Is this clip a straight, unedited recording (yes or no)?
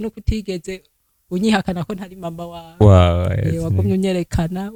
yes